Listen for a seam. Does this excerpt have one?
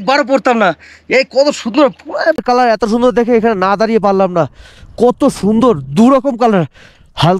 yes; 1 cut; at 2.4 s

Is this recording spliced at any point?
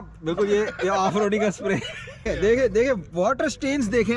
yes; 1 cut; at 2.3 s

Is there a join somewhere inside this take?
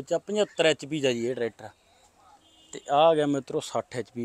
no; 0 cuts

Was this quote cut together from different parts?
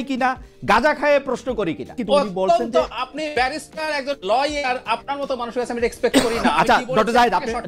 yes; 1 cut; at 2.0 s

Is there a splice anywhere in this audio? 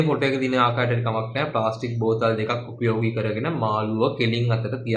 no; 0 cuts

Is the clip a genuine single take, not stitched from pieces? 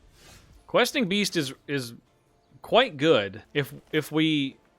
no; 1 cut; at 3.4 s

